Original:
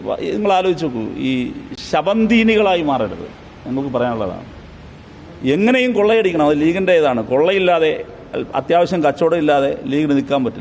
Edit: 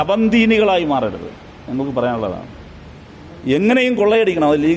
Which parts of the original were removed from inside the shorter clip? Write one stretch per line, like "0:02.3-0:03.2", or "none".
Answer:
none